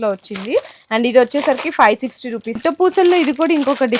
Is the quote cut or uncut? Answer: cut